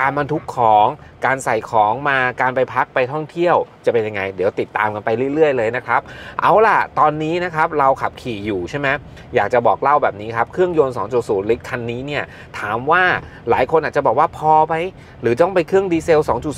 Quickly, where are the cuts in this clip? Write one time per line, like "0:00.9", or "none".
none